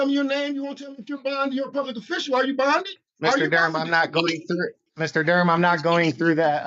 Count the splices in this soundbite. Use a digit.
2